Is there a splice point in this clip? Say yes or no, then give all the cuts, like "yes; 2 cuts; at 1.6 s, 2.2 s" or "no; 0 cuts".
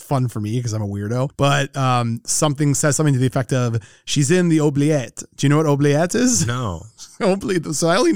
no; 0 cuts